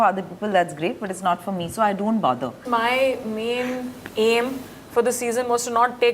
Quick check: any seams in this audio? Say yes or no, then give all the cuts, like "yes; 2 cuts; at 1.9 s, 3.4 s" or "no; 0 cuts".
yes; 1 cut; at 2.6 s